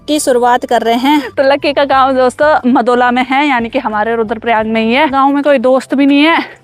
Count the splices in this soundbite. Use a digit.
2